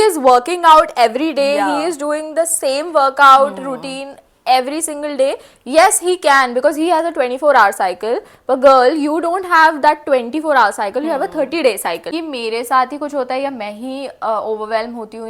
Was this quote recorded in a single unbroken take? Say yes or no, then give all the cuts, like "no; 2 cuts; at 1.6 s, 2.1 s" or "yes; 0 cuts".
no; 1 cut; at 12.0 s